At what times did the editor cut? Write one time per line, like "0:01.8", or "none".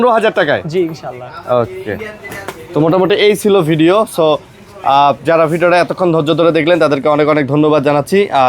none

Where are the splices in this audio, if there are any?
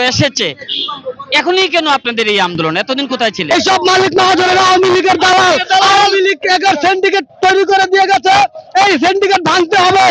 0:03.4

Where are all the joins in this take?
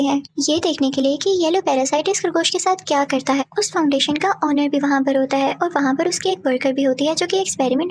none

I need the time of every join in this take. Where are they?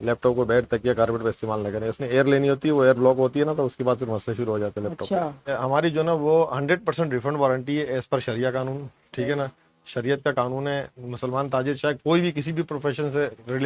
0:05.5

